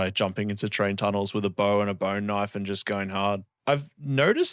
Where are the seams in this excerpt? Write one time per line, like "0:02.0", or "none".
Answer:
0:03.5